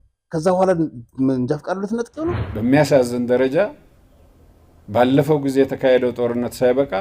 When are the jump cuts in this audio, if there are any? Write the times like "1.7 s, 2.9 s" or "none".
2.5 s